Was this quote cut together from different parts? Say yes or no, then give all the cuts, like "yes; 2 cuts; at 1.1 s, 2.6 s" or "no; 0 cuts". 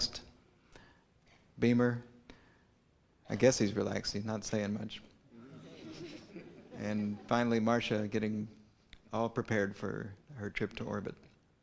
yes; 1 cut; at 4.9 s